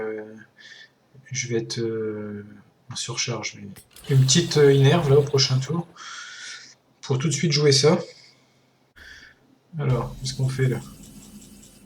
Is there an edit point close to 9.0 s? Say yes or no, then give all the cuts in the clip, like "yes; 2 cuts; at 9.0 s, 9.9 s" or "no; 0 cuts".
yes; 1 cut; at 9.0 s